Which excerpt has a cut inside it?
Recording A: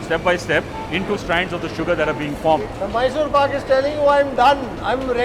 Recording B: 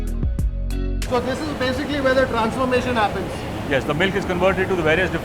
A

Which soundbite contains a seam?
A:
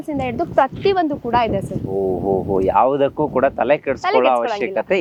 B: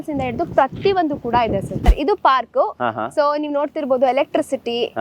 B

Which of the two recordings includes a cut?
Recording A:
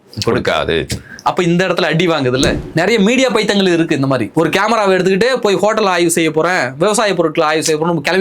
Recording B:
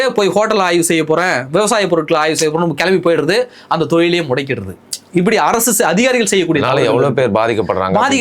A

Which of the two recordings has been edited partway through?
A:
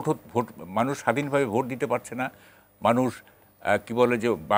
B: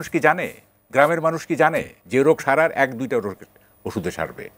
B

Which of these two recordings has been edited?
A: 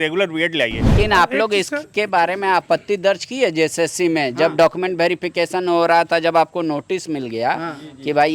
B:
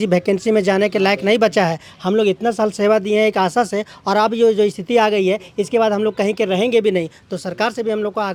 A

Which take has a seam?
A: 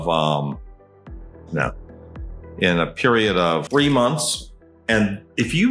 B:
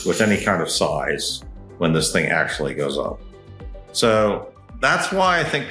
A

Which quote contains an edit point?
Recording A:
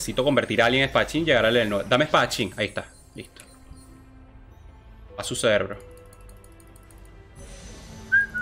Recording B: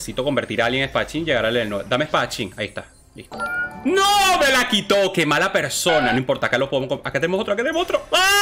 B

